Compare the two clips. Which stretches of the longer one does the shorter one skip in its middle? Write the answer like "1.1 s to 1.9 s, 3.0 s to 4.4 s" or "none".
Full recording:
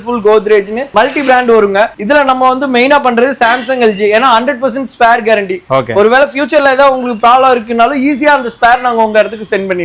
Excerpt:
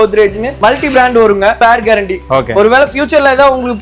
1.9 s to 5.0 s